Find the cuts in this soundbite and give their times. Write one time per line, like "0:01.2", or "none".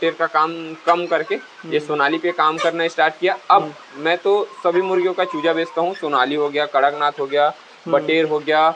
none